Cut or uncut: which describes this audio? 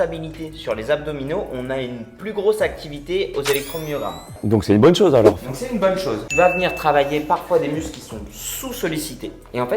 cut